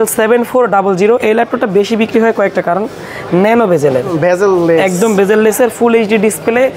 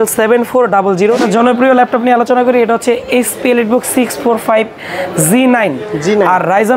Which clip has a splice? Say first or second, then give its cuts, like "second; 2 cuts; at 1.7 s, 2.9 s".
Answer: second; 1 cut; at 1.2 s